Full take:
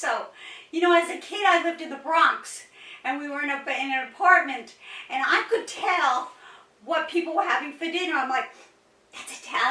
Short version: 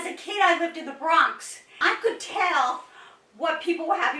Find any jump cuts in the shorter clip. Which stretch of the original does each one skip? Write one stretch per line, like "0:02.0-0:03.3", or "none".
0:02.8-0:05.3

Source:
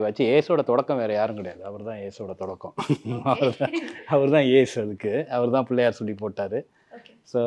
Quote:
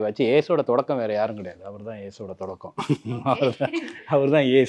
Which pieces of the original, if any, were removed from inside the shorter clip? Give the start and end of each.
none

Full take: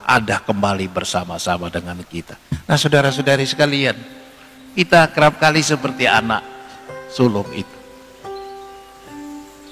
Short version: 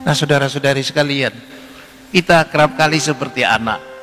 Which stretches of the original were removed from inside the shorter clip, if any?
none

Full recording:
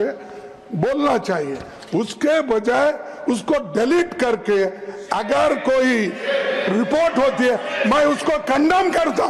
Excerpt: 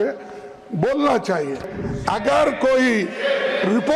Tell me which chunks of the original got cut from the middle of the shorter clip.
0:01.8-0:04.8

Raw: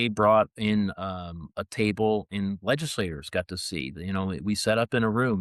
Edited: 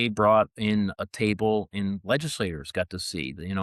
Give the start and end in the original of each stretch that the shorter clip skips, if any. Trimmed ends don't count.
0:01.0-0:01.6

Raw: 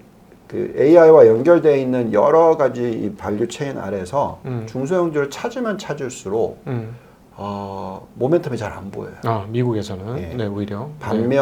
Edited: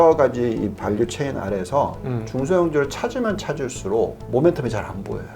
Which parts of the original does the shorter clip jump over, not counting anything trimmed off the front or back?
0:06.6-0:08.1

